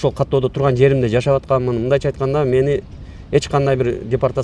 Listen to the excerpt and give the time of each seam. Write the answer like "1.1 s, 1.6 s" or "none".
none